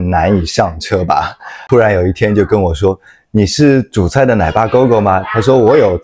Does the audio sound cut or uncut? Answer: cut